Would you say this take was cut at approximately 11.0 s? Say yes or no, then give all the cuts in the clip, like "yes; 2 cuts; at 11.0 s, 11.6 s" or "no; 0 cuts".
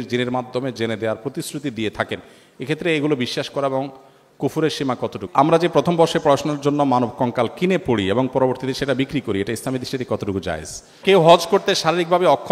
yes; 2 cuts; at 5.2 s, 11.0 s